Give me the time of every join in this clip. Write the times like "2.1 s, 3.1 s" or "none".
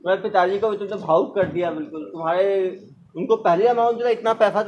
none